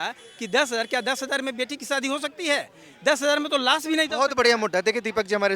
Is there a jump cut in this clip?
no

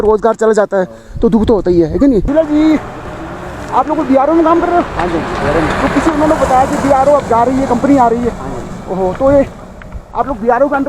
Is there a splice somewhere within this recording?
yes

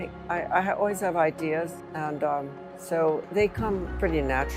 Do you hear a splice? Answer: no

